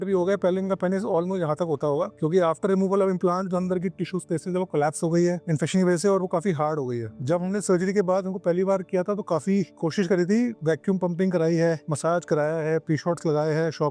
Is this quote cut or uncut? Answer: uncut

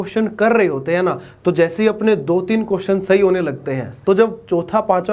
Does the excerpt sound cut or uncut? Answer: uncut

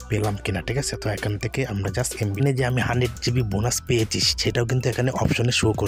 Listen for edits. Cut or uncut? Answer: cut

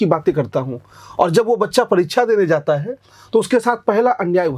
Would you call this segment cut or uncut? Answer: uncut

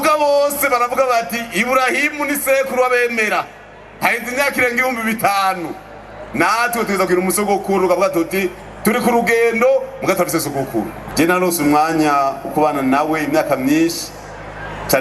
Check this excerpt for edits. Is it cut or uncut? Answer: cut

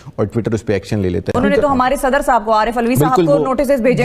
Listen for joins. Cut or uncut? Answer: cut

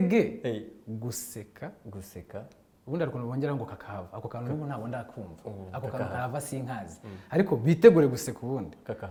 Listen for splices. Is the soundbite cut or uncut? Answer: uncut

